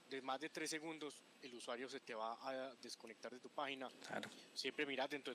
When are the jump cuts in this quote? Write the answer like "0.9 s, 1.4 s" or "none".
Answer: 4.0 s